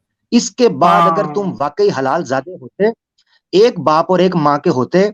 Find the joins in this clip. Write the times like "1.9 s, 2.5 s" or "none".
none